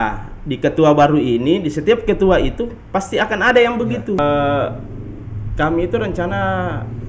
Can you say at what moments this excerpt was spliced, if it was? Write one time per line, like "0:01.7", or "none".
0:04.2